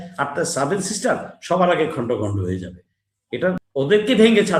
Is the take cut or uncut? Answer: cut